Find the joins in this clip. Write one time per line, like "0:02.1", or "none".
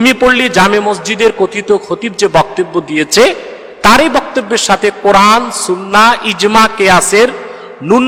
none